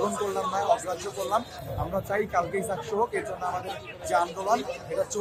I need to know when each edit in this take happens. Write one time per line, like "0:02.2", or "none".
none